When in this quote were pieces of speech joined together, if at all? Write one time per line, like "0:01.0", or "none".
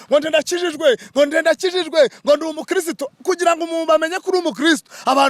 none